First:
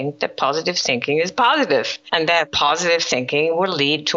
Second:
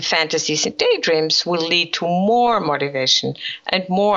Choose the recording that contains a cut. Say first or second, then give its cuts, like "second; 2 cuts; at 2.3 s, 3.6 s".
first; 1 cut; at 2.3 s